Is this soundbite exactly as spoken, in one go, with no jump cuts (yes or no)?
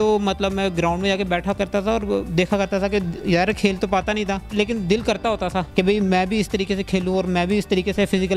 no